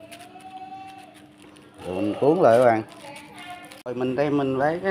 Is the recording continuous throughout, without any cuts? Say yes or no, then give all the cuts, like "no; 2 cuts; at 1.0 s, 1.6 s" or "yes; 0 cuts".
no; 1 cut; at 3.9 s